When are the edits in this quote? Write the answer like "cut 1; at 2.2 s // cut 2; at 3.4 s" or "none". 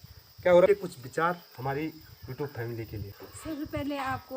cut 1; at 0.7 s // cut 2; at 3.2 s